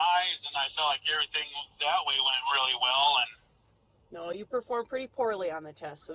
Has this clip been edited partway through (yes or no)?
no